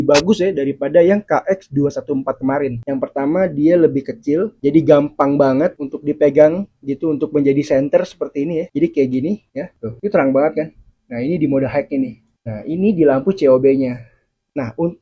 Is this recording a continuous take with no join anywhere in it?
yes; 0 cuts

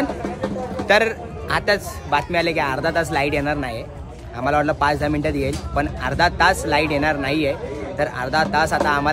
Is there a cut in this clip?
no; 0 cuts

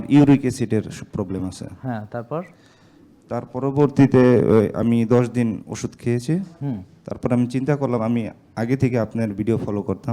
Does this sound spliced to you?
no; 0 cuts

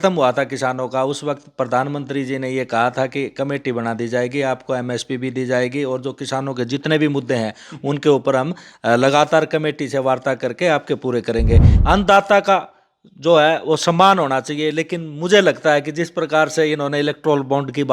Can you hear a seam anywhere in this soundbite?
yes; 1 cut; at 11.7 s

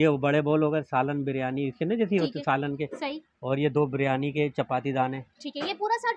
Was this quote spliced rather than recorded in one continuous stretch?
no; 0 cuts

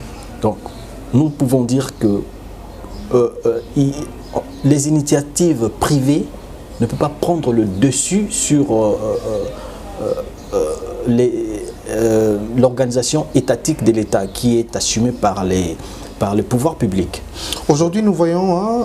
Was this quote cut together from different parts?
no; 0 cuts

